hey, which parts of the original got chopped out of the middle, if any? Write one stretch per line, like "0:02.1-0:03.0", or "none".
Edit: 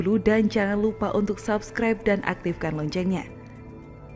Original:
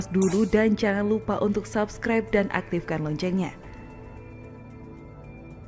0:03.5-0:04.4

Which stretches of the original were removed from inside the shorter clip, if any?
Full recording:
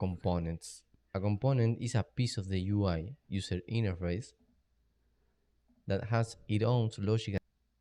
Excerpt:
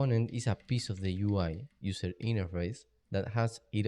0:04.4-0:05.7

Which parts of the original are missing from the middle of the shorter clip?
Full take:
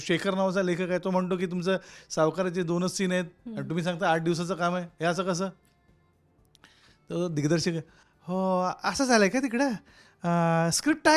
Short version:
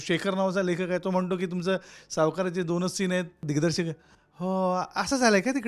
0:03.4-0:07.3

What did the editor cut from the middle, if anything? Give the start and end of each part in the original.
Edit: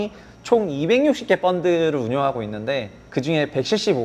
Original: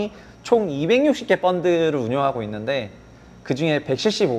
0:03.0-0:03.3

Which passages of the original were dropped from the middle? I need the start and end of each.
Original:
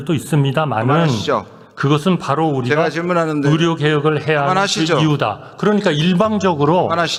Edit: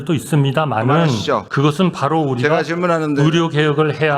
0:01.5-0:01.7

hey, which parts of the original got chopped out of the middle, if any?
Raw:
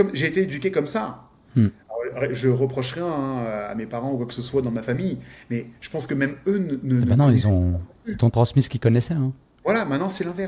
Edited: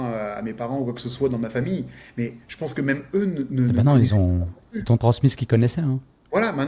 none

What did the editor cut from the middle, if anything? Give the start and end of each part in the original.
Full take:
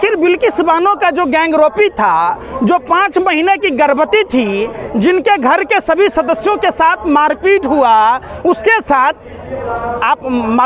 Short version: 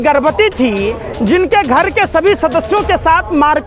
none

